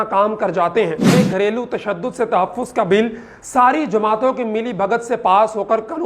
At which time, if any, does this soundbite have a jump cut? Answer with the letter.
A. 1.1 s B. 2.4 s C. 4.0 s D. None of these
A